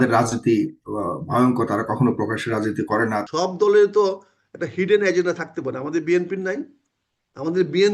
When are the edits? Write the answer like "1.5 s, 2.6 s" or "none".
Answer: 3.3 s